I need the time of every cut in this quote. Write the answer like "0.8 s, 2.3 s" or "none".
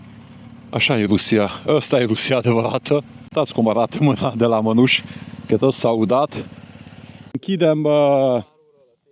3.3 s, 7.4 s